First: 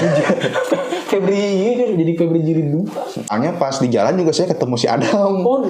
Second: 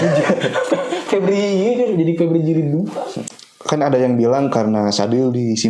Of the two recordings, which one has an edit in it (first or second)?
first